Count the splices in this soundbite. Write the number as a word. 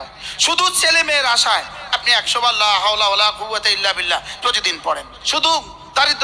one